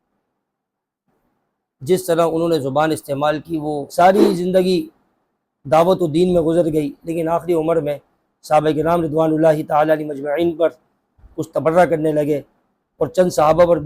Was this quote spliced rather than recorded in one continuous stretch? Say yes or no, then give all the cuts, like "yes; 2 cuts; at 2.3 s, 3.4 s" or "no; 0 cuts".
yes; 1 cut; at 3.8 s